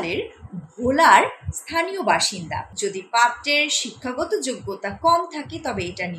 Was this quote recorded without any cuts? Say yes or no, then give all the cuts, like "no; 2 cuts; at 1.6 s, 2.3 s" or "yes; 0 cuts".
no; 1 cut; at 2.6 s